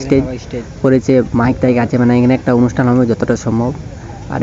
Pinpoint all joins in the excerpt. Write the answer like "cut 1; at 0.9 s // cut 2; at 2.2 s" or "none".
none